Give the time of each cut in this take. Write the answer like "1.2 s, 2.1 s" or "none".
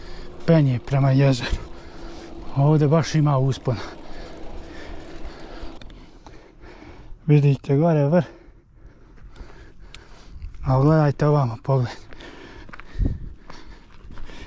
5.9 s